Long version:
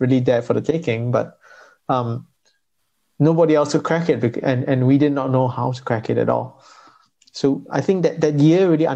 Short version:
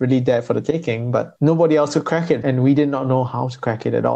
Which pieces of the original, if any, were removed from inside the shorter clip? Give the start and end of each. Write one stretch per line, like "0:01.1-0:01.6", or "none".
0:01.3-0:03.1
0:04.2-0:04.6